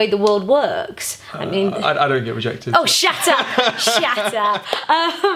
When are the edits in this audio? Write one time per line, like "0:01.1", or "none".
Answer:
none